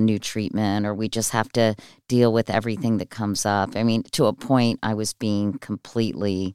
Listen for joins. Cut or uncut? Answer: uncut